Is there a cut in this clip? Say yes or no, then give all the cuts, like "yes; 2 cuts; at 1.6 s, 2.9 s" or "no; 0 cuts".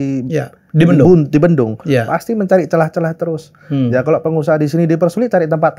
no; 0 cuts